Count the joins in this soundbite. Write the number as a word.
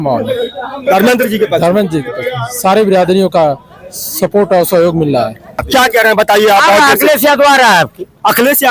one